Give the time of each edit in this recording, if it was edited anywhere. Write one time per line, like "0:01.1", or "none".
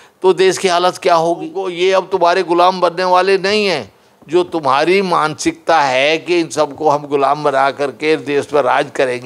0:01.7